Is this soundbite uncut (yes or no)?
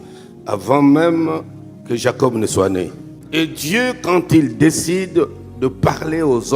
no